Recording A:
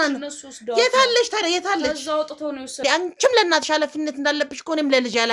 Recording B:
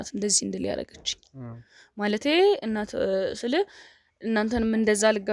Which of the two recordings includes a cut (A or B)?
A